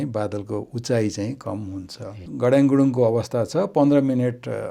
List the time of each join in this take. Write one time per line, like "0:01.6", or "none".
0:02.2